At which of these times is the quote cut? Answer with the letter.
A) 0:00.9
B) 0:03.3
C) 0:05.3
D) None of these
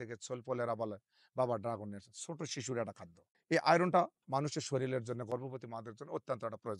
B